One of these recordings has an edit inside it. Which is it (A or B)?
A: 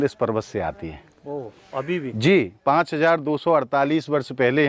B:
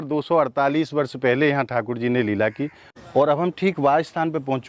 B